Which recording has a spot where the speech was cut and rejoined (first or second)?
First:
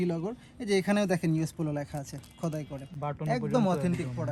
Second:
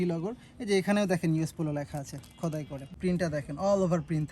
second